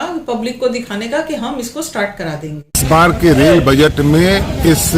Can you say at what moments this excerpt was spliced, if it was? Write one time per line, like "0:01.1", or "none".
0:02.8